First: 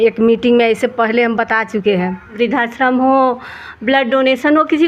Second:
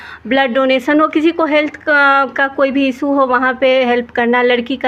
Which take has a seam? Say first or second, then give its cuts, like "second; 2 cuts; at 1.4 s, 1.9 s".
first; 1 cut; at 2.3 s